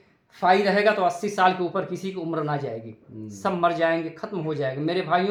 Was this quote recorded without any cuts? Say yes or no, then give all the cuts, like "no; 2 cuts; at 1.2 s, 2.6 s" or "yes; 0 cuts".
yes; 0 cuts